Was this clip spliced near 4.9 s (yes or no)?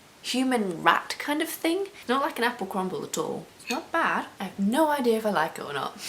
no